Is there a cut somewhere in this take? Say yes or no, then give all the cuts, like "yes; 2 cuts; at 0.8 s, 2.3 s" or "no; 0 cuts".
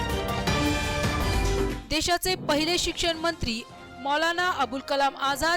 no; 0 cuts